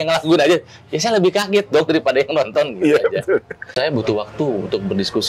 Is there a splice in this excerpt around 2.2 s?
no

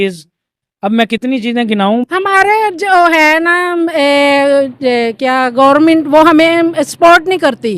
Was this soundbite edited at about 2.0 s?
yes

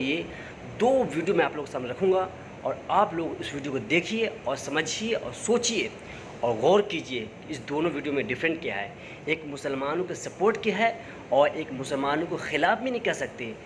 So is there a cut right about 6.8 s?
no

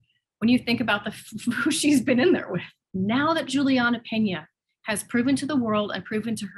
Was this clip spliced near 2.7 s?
yes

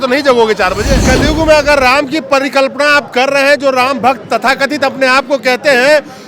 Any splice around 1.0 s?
yes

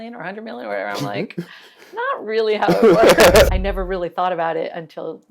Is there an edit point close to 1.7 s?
no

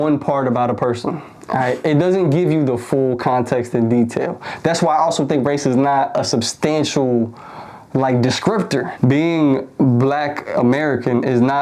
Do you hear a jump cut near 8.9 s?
yes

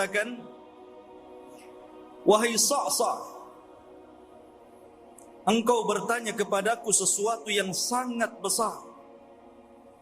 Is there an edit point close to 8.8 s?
no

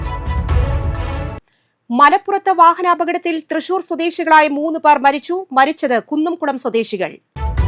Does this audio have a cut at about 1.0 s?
yes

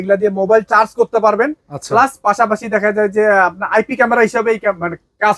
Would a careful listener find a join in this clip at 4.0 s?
no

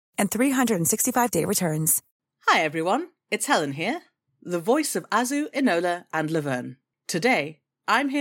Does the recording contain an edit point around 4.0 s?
no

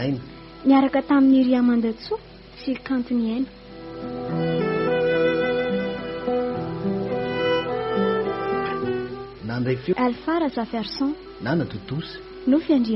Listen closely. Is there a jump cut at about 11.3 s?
yes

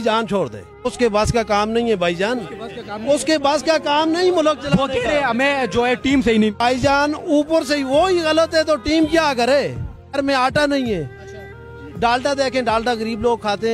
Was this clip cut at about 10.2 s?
yes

